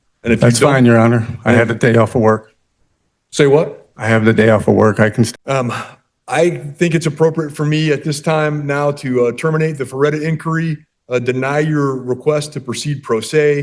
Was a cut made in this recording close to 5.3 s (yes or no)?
yes